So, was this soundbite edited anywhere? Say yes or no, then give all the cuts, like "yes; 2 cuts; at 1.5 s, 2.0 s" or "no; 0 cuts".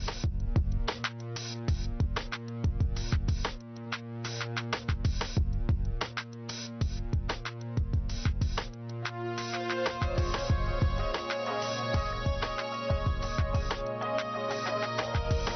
no; 0 cuts